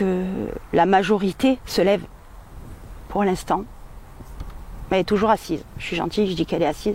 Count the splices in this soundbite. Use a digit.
1